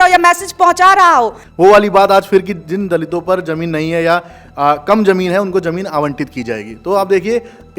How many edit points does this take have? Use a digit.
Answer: 1